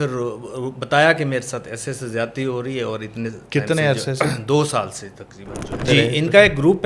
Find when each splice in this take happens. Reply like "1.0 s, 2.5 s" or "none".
5.8 s